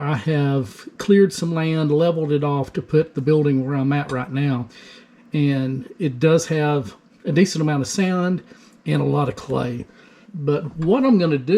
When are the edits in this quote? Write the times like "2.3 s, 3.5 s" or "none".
10.3 s